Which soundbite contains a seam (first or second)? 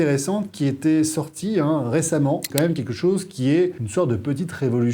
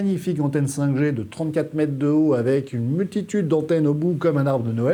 first